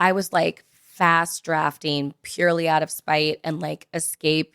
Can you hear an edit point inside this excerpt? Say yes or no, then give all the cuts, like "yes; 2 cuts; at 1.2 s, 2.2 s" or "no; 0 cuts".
no; 0 cuts